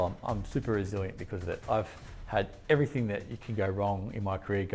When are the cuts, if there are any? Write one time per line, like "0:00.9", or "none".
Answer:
none